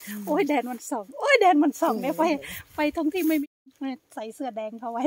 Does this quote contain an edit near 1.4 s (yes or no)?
no